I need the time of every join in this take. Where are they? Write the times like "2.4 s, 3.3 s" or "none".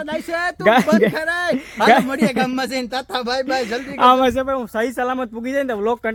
none